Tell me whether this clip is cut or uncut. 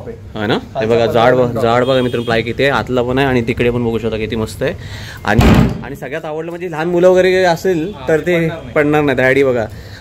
uncut